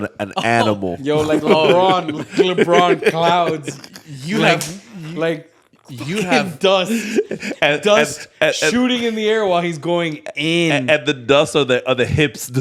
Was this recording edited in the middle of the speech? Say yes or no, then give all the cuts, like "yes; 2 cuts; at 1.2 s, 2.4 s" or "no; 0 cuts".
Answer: no; 0 cuts